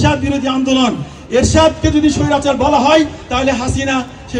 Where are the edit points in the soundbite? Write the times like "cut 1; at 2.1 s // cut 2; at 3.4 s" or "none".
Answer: none